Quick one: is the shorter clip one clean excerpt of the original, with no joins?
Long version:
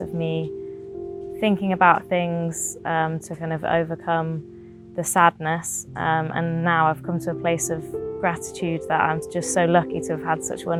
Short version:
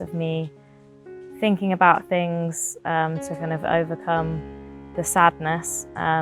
yes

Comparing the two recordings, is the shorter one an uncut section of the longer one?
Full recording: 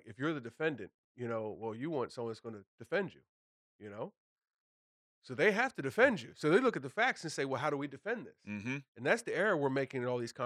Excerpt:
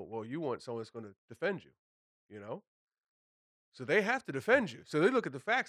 yes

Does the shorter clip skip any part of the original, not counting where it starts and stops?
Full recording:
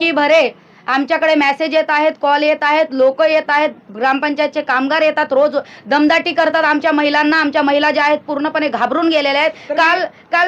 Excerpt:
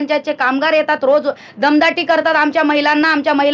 no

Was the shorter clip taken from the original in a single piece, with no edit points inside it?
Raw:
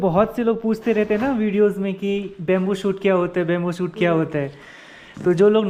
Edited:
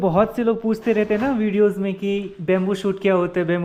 yes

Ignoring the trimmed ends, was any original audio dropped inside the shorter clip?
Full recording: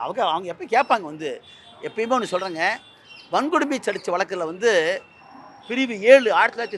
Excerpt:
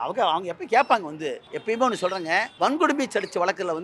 yes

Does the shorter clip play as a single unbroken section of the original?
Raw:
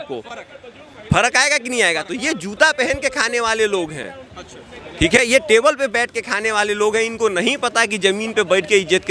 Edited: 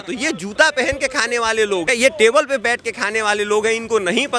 no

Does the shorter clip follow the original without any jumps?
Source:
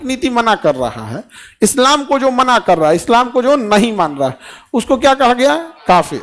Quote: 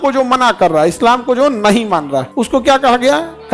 no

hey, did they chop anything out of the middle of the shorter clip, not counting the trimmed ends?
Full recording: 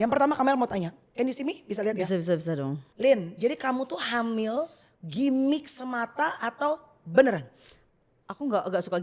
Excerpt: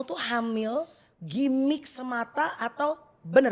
no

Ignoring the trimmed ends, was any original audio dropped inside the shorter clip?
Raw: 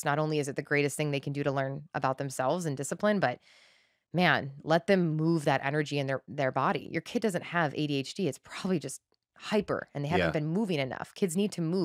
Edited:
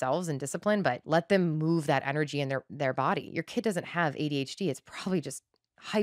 yes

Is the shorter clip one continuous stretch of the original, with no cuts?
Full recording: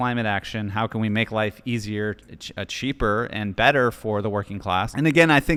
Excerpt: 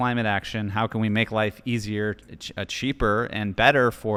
yes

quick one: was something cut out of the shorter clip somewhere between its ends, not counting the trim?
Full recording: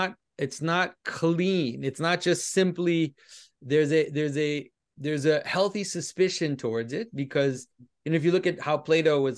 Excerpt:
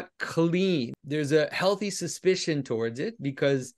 yes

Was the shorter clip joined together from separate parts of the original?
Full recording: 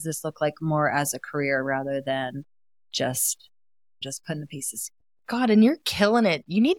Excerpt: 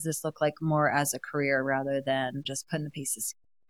yes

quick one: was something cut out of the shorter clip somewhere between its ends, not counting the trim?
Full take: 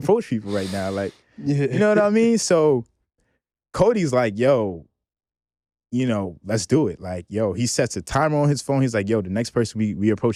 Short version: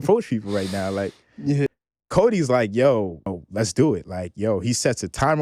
yes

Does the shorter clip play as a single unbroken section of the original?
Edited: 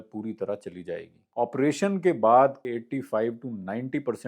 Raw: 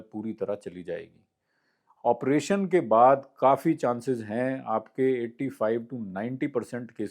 no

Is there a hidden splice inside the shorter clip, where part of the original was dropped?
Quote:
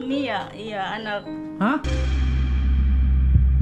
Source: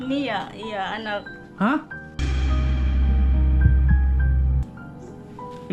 yes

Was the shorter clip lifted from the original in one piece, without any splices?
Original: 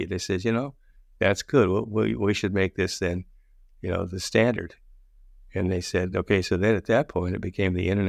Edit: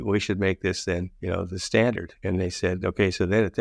no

